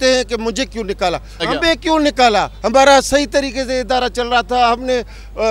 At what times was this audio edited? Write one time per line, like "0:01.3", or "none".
0:01.4